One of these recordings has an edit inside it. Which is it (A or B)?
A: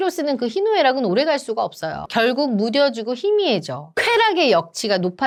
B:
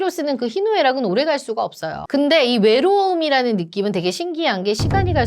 B